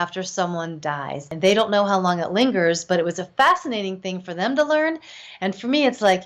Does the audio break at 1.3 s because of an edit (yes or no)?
yes